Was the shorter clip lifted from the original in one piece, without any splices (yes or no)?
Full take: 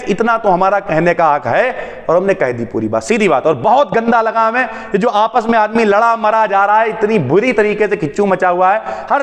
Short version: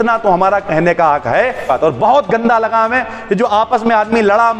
no